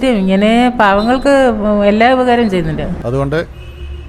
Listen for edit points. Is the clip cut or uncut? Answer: cut